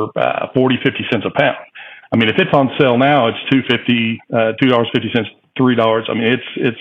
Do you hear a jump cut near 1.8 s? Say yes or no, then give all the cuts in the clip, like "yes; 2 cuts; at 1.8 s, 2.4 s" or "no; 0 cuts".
no; 0 cuts